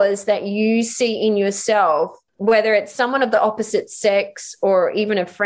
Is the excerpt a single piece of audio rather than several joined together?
no; 1 cut; at 2.2 s

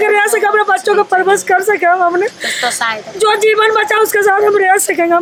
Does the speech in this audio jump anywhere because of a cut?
no; 0 cuts

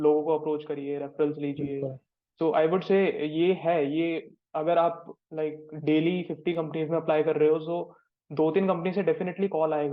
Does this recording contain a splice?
no; 0 cuts

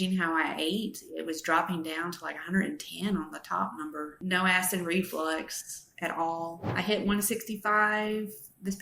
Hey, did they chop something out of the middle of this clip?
yes; 2 cuts; at 4.2 s, 6.7 s

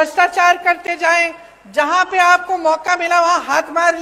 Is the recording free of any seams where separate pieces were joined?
yes; 0 cuts

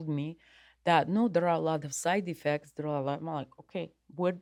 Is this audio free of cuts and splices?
yes; 0 cuts

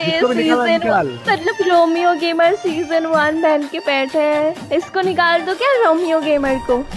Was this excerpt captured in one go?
yes; 0 cuts

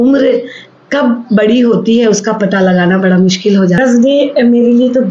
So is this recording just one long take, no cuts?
no; 1 cut; at 3.8 s

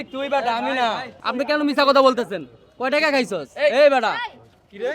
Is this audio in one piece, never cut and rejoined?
no; 1 cut; at 1.2 s

